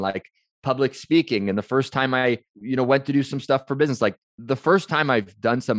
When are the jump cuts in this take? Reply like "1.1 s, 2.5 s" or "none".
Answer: 2.6 s, 4.3 s